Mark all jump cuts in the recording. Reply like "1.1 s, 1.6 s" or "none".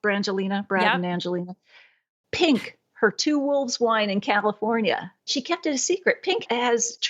2.1 s, 5.3 s